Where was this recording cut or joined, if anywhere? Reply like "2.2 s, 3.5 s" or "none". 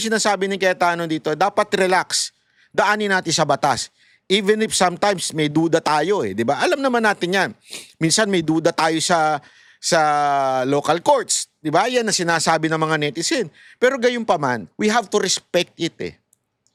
none